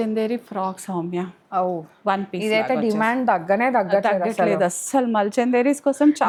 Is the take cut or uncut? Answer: uncut